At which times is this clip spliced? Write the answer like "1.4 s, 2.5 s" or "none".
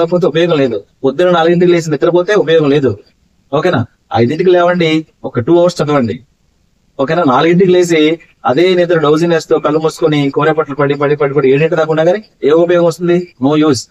none